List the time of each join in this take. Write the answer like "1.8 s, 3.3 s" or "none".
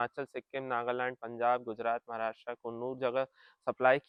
none